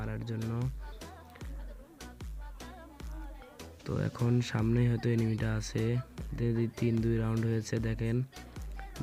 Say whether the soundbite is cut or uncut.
uncut